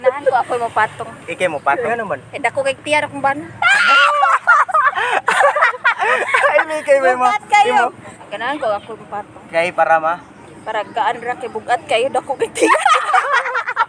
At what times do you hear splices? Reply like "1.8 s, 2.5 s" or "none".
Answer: 1.9 s, 8.1 s